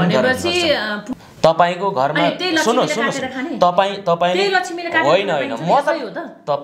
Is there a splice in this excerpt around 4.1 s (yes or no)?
no